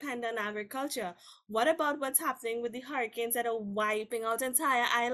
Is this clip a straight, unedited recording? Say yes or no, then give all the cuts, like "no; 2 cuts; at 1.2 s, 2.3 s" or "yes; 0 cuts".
no; 1 cut; at 4.1 s